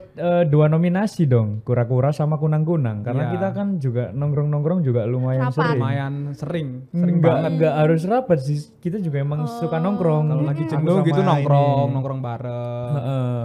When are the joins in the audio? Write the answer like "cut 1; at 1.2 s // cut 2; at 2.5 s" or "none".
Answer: none